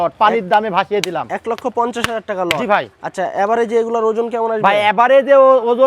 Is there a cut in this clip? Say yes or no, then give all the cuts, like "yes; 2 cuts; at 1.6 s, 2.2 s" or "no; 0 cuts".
no; 0 cuts